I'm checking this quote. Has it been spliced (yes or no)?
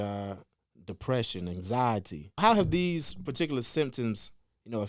yes